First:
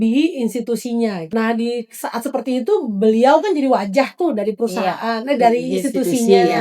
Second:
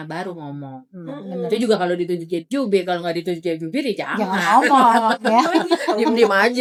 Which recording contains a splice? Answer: first; 1 cut; at 1.2 s

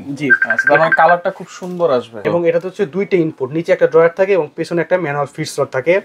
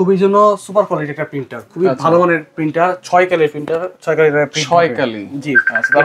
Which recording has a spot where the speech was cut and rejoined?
first; 1 cut; at 2.2 s

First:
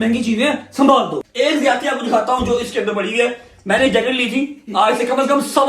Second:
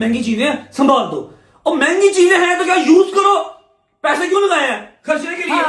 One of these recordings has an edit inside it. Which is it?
first; 1 cut; at 1.2 s

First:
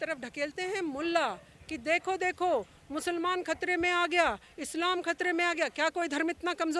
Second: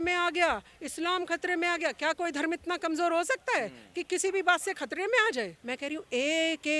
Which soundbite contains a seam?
second; 1 cut; at 5.6 s

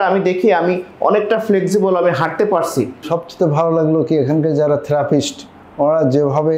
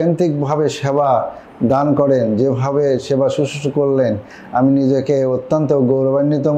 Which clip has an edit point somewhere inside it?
first; 1 cut; at 3.0 s

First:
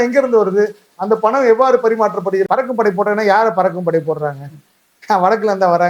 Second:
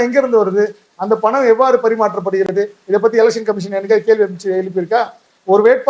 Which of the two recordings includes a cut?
first; 1 cut; at 2.5 s

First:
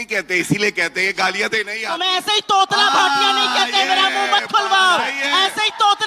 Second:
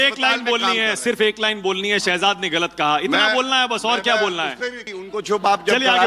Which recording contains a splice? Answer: second; 1 cut; at 5.0 s

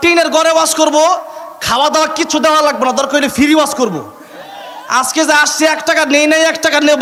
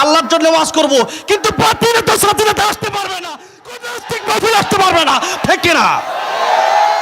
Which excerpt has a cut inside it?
second; 1 cut; at 5.4 s

